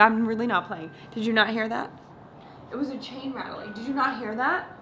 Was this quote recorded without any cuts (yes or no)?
yes